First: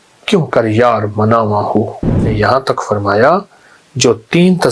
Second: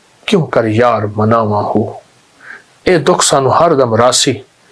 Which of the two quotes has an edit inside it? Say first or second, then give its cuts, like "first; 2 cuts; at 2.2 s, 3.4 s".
first; 1 cut; at 2.3 s